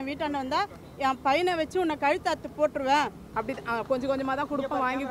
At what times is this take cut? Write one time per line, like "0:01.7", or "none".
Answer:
0:03.2